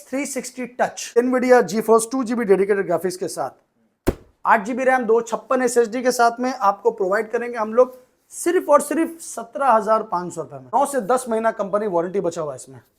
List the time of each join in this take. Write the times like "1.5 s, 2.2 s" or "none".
1.2 s, 10.7 s

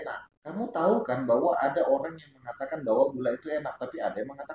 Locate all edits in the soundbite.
none

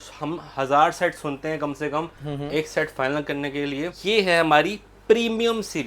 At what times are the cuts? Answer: 3.9 s

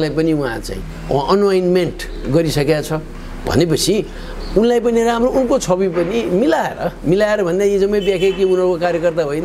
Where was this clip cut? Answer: none

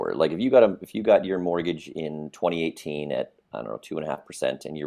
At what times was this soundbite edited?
none

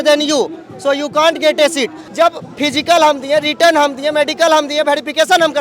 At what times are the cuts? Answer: 2.0 s

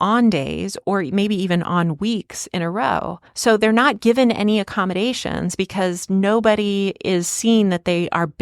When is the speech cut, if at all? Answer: 3.2 s

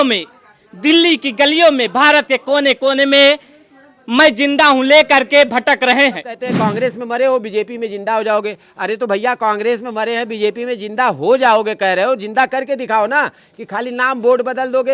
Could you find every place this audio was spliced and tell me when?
6.4 s

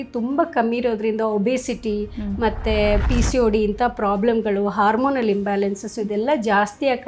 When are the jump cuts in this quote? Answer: none

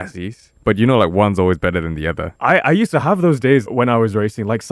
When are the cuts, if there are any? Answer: 2.3 s, 3.7 s

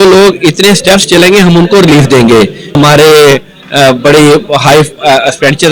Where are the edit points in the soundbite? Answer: 2.8 s

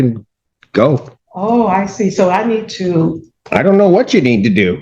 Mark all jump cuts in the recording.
1.2 s

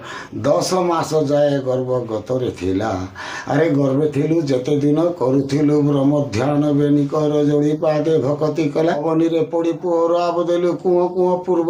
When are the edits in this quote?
9.0 s

